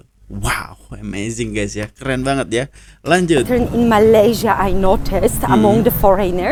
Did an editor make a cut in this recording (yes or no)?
no